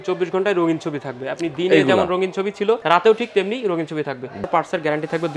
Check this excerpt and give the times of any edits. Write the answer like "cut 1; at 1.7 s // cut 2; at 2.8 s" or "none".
cut 1; at 2.8 s // cut 2; at 4.4 s